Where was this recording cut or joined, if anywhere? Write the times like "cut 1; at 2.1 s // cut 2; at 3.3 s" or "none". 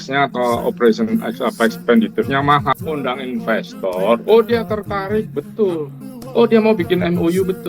cut 1; at 2.7 s